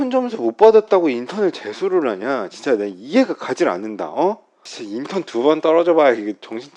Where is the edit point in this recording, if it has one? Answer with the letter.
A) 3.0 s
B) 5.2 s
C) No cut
C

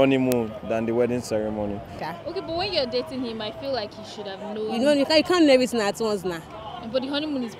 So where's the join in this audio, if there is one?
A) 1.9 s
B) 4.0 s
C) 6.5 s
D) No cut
A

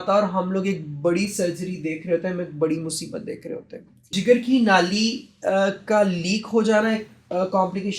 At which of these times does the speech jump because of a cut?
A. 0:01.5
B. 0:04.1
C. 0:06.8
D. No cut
B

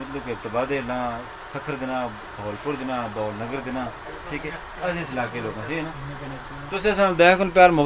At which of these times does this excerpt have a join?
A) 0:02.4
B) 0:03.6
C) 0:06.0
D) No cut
C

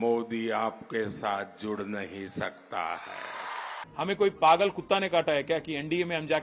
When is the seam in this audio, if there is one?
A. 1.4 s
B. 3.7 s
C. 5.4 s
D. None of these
B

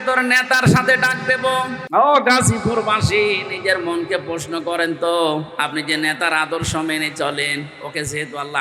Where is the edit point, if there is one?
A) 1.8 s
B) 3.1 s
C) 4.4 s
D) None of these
A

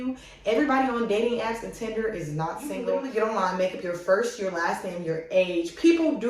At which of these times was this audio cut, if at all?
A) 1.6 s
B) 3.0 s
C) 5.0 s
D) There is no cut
B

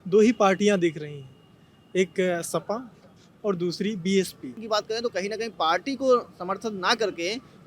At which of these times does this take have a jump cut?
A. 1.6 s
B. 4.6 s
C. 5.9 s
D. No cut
B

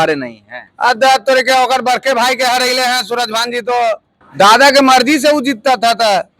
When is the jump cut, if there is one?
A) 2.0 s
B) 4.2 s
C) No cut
B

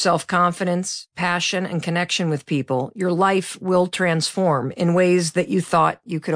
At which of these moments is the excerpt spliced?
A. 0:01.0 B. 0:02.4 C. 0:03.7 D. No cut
A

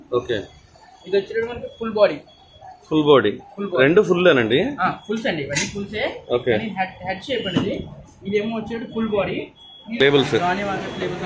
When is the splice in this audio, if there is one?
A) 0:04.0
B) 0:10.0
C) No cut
B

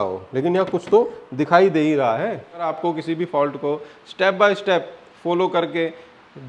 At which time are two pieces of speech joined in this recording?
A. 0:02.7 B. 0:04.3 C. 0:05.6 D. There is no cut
A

